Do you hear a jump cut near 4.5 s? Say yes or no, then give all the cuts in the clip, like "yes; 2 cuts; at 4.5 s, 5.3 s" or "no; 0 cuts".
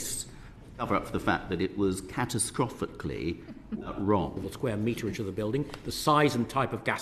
yes; 1 cut; at 4.5 s